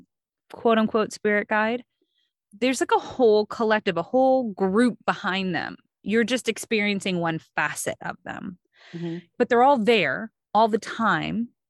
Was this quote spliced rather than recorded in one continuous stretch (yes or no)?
yes